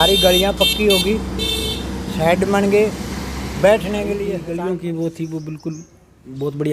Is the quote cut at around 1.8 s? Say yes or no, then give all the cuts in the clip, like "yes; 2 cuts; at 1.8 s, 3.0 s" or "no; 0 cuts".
no; 1 cut; at 4.4 s